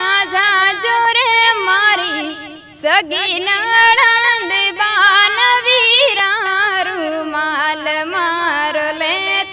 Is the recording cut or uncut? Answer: uncut